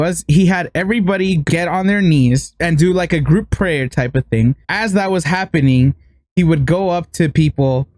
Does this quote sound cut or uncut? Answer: cut